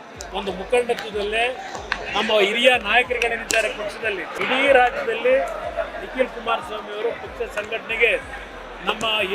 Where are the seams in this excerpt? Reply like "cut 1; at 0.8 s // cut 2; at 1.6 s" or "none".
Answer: cut 1; at 4.3 s